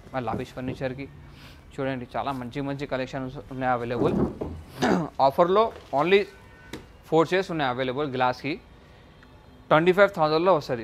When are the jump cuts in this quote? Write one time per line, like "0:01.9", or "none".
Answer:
0:04.8

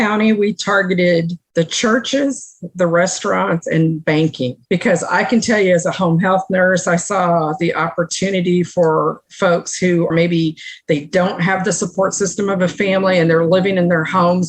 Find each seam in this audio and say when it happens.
0:01.4
0:04.6

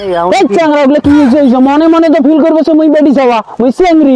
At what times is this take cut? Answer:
none

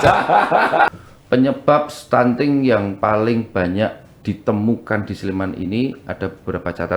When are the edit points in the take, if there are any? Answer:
0:00.9

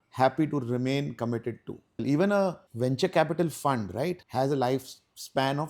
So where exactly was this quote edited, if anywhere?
0:02.0
0:02.6
0:04.2

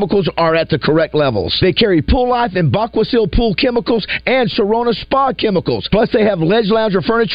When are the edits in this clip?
none

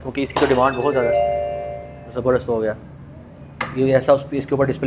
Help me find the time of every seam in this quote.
none

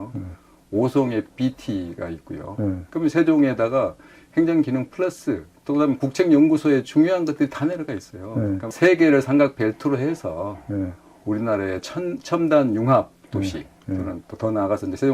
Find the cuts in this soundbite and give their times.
0:08.7

